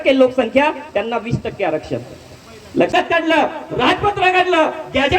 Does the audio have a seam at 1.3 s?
no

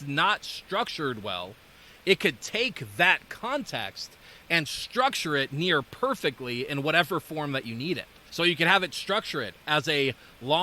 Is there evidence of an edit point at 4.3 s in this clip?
no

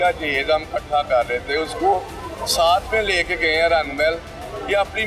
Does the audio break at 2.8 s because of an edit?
no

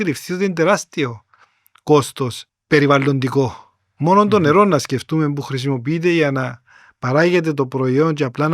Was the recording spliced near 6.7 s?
no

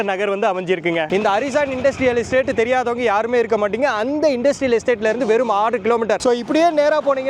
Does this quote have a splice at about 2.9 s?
no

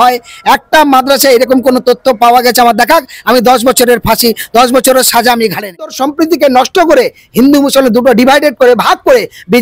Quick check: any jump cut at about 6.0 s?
yes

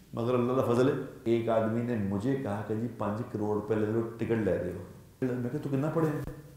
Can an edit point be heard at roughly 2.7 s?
no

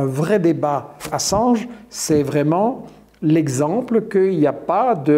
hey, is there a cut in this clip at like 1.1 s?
yes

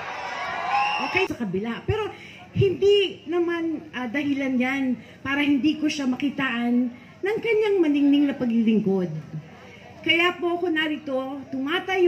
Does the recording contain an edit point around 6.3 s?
no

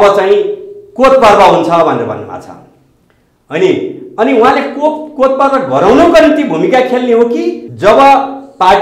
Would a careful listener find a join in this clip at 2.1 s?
no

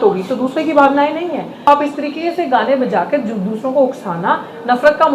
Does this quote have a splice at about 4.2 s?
no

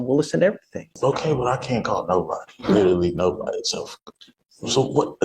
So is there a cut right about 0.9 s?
yes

